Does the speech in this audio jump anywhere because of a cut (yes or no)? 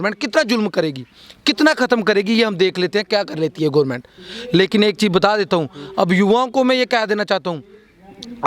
no